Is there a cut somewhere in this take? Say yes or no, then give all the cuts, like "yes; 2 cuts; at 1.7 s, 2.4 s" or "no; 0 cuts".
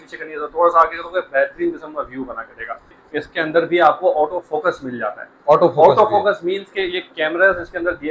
yes; 1 cut; at 3.0 s